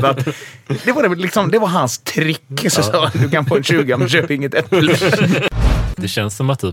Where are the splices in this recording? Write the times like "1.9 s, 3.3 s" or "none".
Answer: 5.5 s